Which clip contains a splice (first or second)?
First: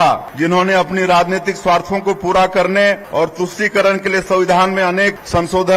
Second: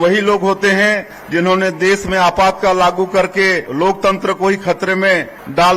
second